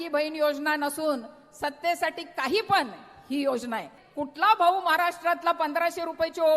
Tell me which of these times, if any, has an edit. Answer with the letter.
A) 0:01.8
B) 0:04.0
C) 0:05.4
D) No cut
B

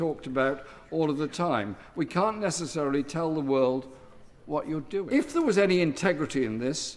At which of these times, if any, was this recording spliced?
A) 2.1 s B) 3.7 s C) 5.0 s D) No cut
C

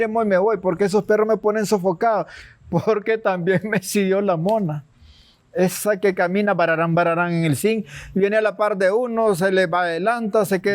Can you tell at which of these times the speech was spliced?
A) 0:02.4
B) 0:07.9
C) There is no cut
A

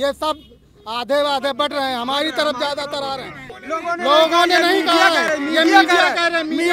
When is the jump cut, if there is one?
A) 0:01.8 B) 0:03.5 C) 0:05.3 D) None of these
B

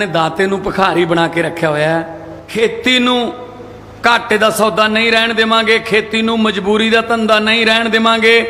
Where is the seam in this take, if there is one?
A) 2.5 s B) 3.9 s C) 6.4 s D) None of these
A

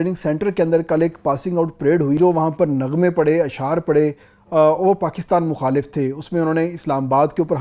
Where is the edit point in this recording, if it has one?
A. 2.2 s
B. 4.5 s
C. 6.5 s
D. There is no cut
A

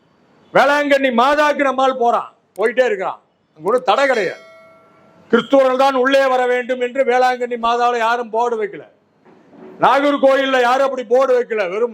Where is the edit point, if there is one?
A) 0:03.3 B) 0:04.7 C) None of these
C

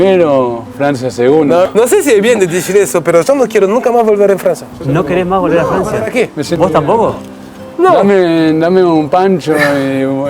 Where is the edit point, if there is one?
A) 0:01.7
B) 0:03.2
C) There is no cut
A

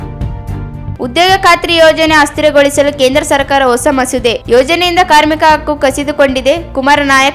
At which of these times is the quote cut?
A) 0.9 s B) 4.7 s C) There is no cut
A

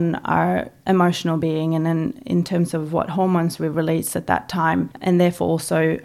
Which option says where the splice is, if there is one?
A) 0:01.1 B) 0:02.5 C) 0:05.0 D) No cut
C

